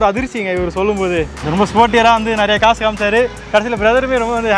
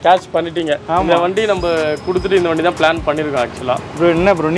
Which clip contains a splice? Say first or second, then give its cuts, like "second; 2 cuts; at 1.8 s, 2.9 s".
first; 1 cut; at 1.4 s